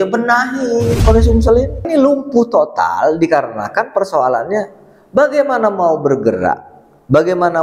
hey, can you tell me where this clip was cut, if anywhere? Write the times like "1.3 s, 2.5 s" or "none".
1.9 s